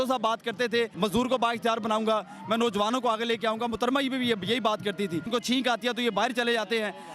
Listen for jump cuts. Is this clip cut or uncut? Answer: cut